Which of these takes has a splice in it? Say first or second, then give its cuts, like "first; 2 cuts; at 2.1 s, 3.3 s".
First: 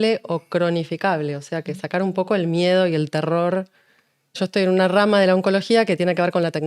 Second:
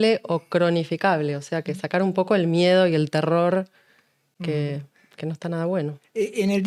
first; 1 cut; at 4.4 s